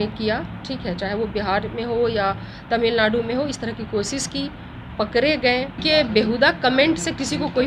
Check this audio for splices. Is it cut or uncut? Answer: cut